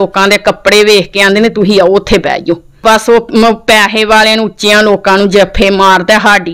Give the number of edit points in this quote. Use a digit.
1